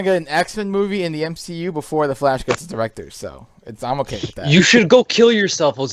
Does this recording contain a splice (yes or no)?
no